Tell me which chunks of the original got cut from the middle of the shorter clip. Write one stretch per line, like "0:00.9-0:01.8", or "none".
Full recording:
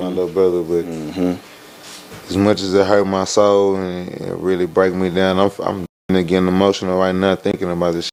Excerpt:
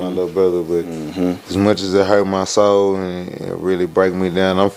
0:01.4-0:02.2